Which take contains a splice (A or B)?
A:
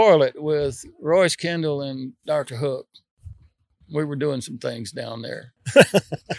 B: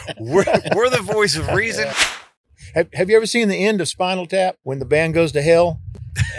B